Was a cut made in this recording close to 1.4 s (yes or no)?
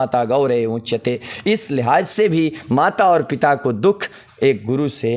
no